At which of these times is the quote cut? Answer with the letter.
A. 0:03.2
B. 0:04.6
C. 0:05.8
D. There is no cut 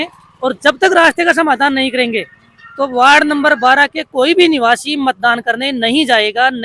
D